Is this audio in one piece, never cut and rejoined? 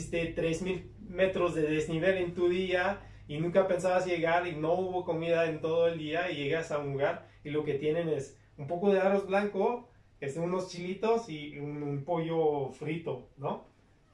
yes; 0 cuts

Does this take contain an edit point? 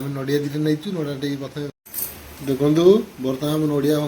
yes; 1 cut; at 1.7 s

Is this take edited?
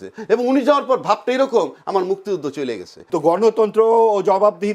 yes; 1 cut; at 2.9 s

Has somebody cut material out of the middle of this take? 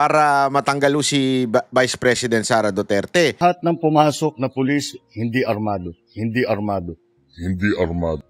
yes; 1 cut; at 3.4 s

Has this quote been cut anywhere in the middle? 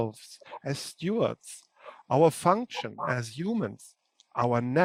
no; 0 cuts

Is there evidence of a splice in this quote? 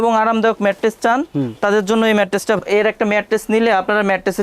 yes; 1 cut; at 2.6 s

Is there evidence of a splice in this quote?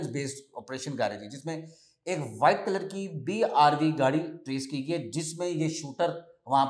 no; 0 cuts

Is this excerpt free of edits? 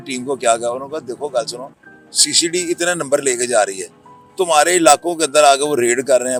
yes; 0 cuts

